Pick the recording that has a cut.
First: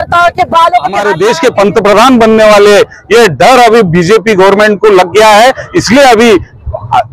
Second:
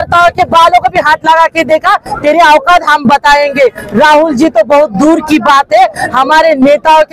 first; 1 cut; at 1.1 s

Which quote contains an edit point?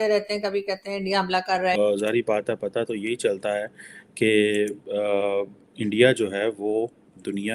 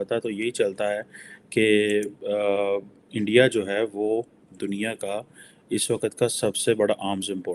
first; 1 cut; at 1.7 s

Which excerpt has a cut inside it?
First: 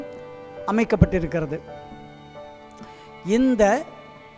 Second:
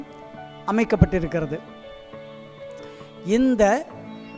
second; 2 cuts; at 1.6 s, 3.2 s

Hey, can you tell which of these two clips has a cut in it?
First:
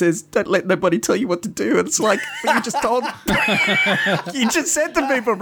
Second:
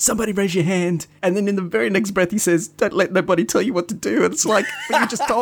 second; 1 cut; at 1.1 s

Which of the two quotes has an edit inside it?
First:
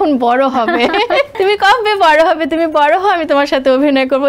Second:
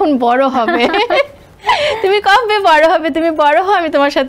first; 1 cut; at 1.3 s

